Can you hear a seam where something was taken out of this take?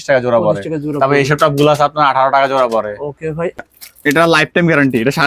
yes; 1 cut; at 3.6 s

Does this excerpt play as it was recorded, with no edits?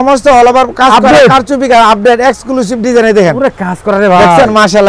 yes; 0 cuts

